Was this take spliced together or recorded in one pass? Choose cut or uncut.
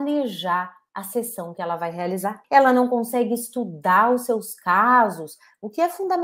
cut